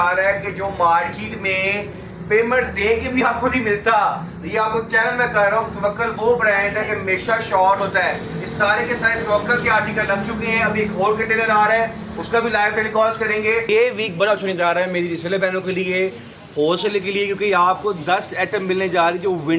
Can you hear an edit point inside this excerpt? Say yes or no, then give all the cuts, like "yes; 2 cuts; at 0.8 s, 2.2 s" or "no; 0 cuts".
yes; 1 cut; at 13.7 s